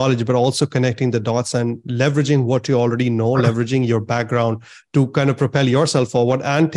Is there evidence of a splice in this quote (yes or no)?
no